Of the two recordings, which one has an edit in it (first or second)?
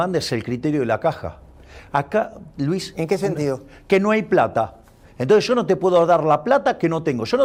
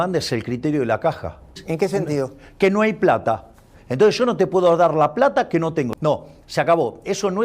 second